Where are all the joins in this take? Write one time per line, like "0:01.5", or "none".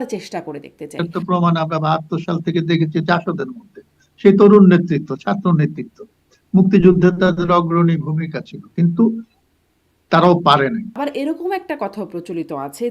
0:01.0
0:10.9